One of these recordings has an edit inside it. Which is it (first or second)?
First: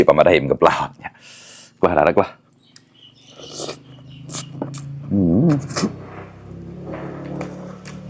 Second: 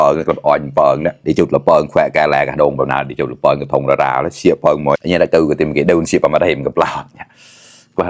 second